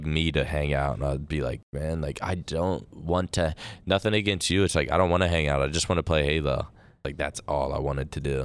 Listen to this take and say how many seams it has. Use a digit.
2